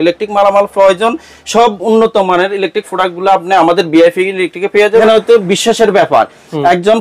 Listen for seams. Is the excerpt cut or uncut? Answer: cut